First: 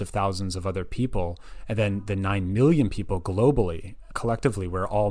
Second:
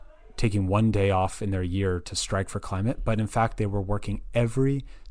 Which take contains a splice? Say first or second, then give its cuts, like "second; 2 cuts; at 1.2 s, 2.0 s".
first; 1 cut; at 4.1 s